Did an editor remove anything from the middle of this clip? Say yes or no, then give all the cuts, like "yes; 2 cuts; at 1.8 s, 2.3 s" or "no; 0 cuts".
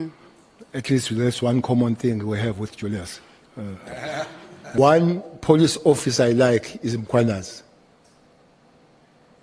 yes; 1 cut; at 4.8 s